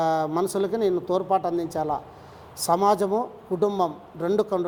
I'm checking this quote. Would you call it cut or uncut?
uncut